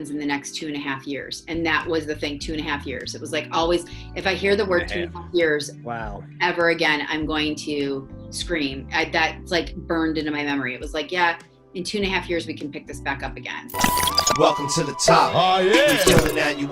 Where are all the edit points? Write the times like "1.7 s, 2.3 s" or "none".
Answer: 13.6 s